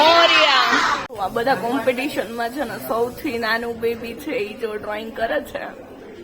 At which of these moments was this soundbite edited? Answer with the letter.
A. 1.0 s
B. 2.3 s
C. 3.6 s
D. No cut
A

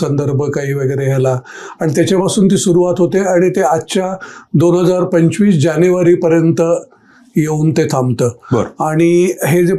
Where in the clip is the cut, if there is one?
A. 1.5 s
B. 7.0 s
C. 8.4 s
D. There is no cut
D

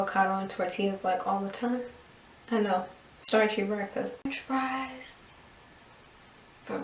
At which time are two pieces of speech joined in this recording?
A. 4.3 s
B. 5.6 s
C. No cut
A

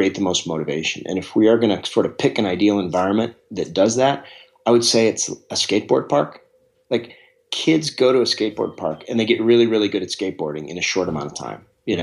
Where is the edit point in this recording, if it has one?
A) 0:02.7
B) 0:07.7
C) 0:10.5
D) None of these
D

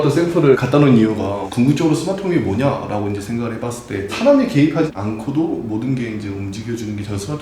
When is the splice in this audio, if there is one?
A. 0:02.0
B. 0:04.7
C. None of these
C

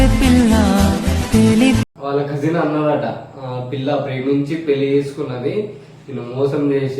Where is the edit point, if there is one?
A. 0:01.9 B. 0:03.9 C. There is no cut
A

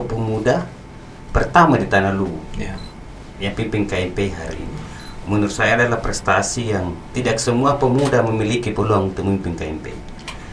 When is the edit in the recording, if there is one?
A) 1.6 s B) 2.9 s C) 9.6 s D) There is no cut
D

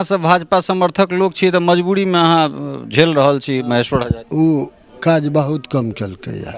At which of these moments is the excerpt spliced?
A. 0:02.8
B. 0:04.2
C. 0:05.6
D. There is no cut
B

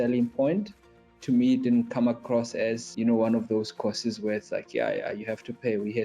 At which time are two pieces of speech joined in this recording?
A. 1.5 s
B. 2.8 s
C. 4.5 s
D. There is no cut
B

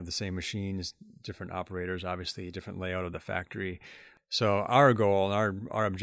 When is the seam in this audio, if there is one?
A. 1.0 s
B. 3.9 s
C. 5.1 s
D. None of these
B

